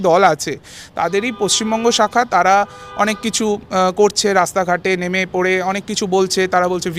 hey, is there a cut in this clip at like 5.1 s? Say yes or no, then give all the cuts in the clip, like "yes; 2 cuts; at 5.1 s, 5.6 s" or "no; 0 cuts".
no; 0 cuts